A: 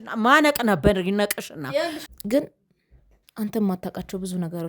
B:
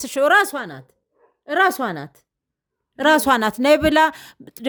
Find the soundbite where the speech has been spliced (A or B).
A